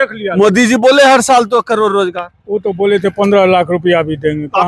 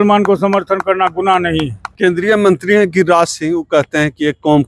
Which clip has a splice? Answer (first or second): second